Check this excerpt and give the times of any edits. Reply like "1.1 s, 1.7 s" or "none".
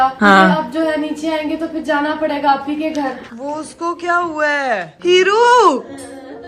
3.2 s, 4.9 s